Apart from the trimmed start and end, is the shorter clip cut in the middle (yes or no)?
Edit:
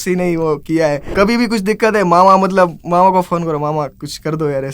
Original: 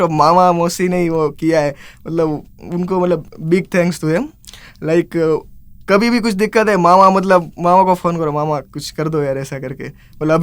yes